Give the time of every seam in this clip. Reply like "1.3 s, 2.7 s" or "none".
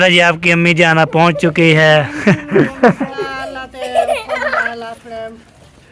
3.1 s